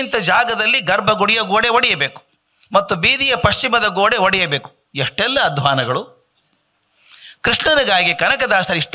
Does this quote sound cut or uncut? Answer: uncut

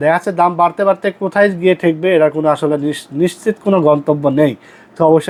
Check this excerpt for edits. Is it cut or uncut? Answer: uncut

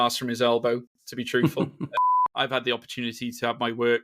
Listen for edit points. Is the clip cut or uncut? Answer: cut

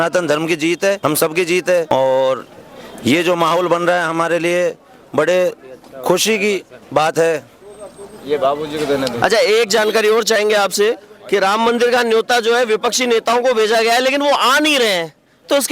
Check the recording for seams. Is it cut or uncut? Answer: uncut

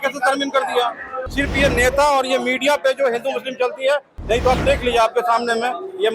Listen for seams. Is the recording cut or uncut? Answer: cut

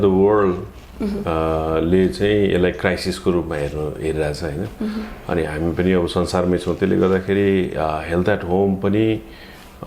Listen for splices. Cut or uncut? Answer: uncut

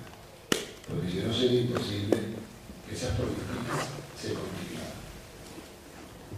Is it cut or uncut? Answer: uncut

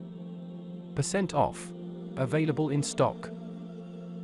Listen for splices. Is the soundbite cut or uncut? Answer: cut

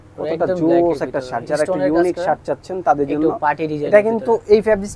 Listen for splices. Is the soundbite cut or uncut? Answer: uncut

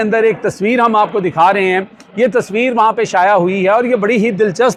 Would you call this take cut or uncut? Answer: uncut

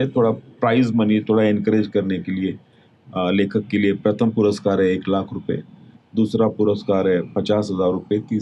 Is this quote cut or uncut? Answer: uncut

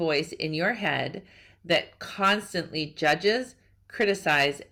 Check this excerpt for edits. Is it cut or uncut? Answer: uncut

